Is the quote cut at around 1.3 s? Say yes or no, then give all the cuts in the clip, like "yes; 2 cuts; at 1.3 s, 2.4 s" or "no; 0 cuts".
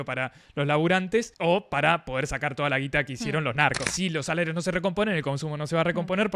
yes; 2 cuts; at 1.3 s, 3.9 s